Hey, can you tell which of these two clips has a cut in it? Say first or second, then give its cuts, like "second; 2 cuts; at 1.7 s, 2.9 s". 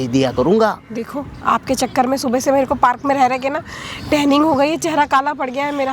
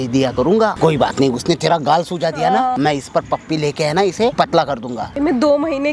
second; 3 cuts; at 0.8 s, 2.8 s, 4.8 s